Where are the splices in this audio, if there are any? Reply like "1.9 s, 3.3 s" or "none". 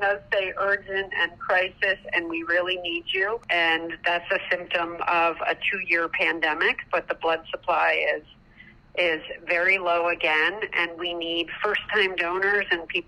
none